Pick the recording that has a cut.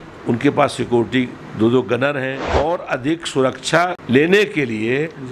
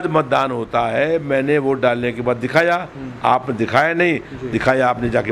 first; 2 cuts; at 2.4 s, 4.0 s

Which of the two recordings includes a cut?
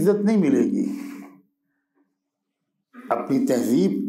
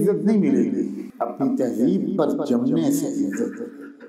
second; 1 cut; at 1.0 s

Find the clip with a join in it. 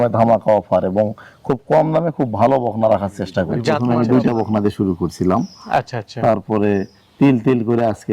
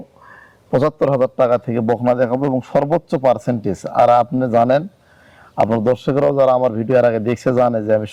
first; 1 cut; at 3.8 s

